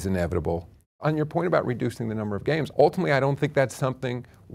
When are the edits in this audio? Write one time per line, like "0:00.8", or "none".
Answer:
0:00.9
0:02.7